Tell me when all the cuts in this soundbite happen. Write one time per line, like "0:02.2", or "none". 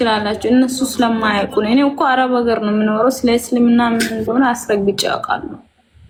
none